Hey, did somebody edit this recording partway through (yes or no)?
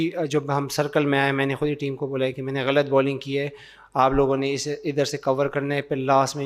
no